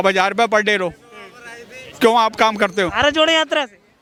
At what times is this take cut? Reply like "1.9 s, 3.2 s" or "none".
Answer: none